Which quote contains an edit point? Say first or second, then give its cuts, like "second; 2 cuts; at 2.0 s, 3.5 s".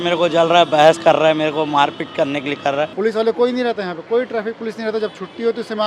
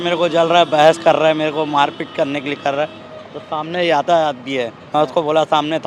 first; 1 cut; at 2.9 s